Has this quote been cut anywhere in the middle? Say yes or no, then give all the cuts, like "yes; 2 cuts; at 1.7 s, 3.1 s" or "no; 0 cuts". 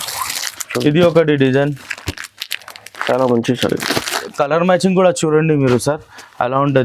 yes; 1 cut; at 4.2 s